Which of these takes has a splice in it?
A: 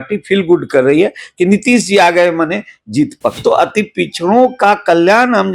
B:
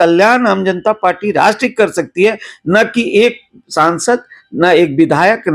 A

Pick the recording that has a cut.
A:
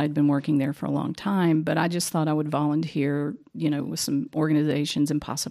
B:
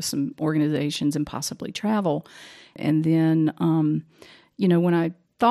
B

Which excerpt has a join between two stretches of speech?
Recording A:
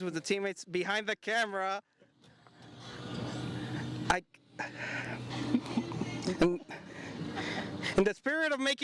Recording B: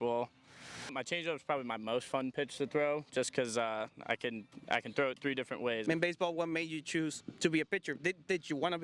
B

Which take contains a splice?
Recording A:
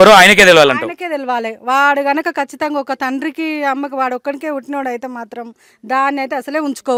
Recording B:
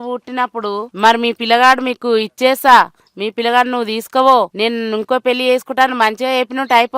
B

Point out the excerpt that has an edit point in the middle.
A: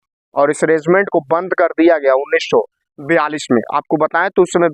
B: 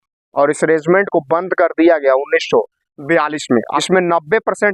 B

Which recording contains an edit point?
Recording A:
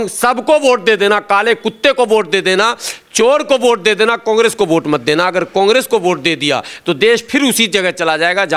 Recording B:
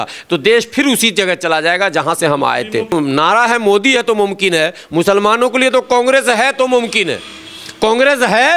B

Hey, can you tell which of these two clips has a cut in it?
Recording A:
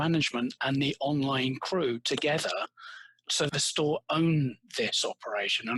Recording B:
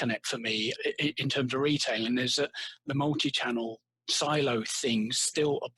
A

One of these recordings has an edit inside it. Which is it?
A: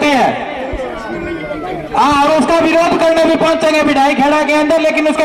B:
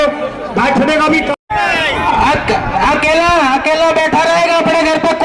B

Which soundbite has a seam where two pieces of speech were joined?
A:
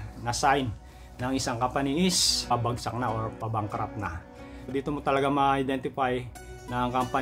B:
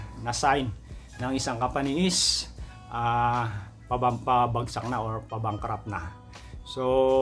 A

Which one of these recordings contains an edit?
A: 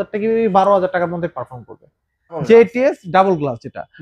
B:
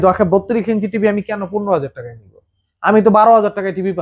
A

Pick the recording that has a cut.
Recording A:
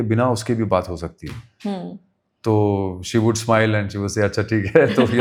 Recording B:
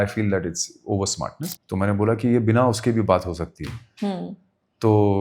B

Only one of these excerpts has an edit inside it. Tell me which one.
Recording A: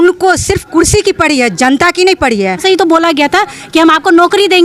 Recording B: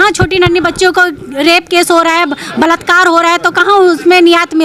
A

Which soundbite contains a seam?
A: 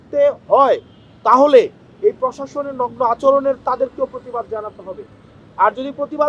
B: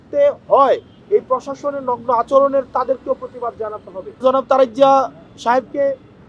B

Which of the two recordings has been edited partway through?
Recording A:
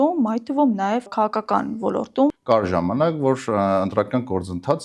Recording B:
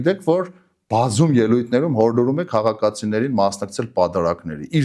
A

